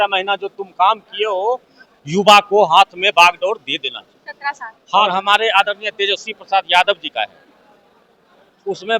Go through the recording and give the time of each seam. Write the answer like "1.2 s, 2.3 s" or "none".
5.0 s